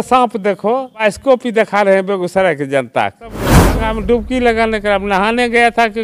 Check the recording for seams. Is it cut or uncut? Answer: cut